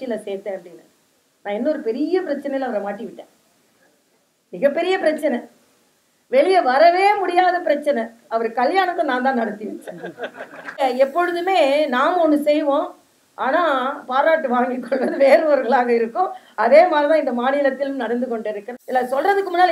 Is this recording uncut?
no; 2 cuts; at 10.8 s, 18.7 s

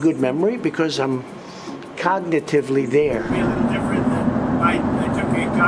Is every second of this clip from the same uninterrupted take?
no; 1 cut; at 3.3 s

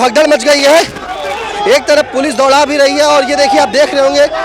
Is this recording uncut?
yes; 0 cuts

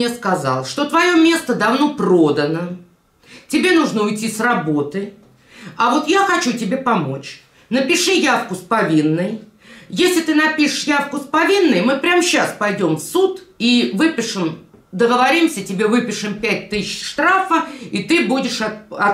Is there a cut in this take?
no; 0 cuts

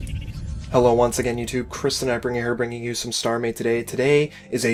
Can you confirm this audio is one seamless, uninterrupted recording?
yes; 0 cuts

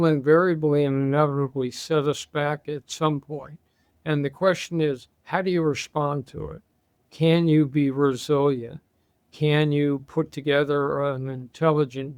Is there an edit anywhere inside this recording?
no; 0 cuts

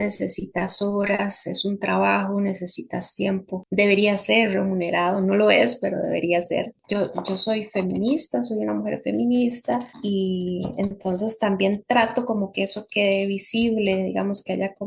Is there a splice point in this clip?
yes; 3 cuts; at 3.6 s, 6.8 s, 9.9 s

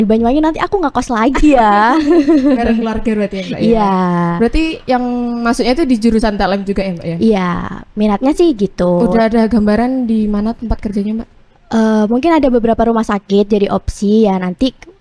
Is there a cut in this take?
no; 0 cuts

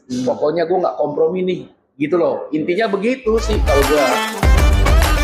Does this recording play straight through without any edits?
no; 1 cut; at 4.1 s

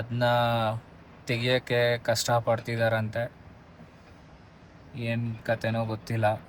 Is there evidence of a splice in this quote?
no; 0 cuts

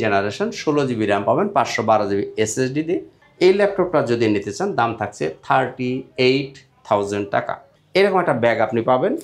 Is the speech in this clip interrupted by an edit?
yes; 1 cut; at 7.7 s

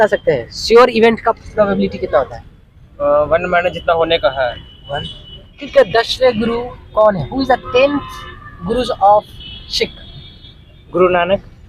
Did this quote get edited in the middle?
yes; 1 cut; at 5.6 s

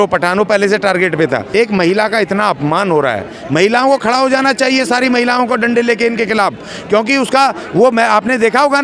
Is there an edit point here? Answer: yes; 1 cut; at 1.5 s

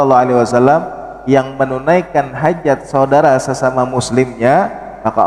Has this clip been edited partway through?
no; 0 cuts

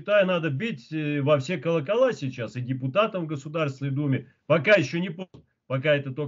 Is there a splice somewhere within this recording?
no; 0 cuts

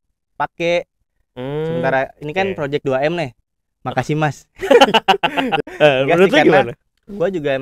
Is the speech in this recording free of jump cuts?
no; 1 cut; at 5.5 s

